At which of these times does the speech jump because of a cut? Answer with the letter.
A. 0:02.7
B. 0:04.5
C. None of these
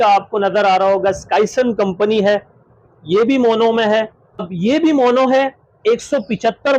B